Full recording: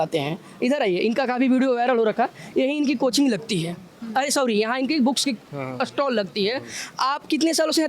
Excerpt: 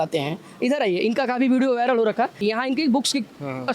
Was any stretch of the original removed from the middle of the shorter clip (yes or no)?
yes